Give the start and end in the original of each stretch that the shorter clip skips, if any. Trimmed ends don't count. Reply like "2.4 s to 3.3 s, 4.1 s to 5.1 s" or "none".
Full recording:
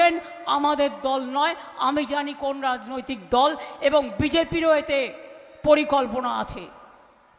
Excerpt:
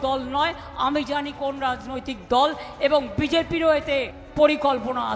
5.2 s to 5.5 s